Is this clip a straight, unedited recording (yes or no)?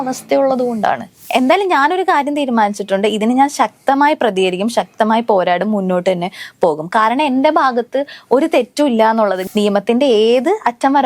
no